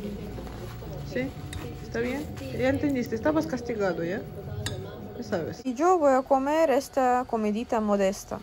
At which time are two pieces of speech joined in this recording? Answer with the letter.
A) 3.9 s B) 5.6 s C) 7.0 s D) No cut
B